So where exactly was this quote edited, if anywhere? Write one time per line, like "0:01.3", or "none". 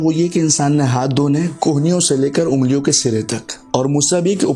0:03.6